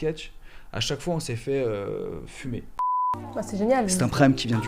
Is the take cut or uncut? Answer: cut